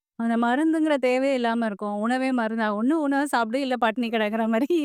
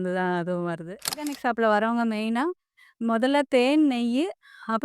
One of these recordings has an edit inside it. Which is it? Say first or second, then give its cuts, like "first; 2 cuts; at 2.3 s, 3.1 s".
second; 1 cut; at 1.3 s